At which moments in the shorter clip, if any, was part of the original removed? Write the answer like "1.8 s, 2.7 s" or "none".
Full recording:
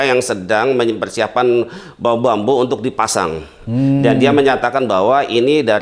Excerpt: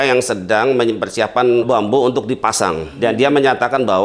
1.7 s, 3.0 s

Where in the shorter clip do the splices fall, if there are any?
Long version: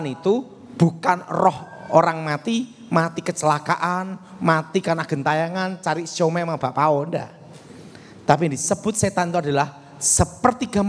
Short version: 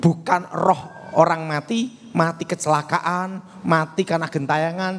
none

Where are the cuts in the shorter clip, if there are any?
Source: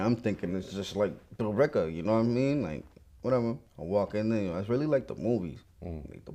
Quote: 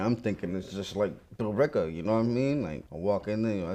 2.9 s

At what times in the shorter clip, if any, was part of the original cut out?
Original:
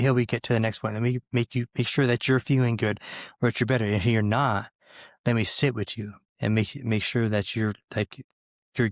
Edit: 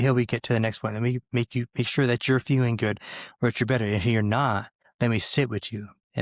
4.8 s

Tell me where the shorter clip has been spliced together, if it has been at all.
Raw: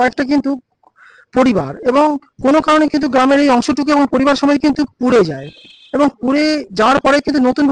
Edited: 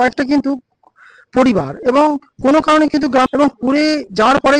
3.3 s

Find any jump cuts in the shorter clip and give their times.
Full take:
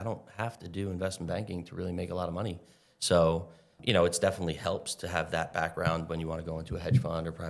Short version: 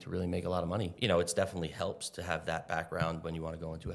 0.9 s

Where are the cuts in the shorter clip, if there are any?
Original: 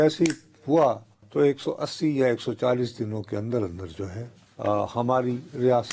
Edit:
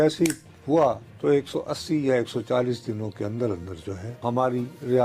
1.1 s, 4.2 s

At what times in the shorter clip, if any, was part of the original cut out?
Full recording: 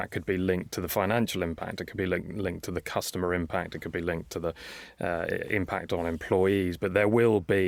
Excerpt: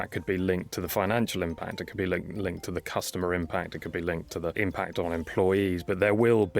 4.5 s

